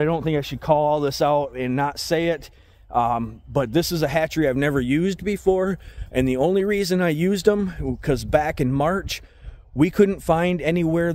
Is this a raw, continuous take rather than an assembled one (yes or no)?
yes